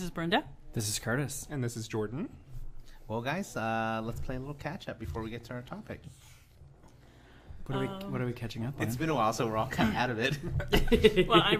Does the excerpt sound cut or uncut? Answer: uncut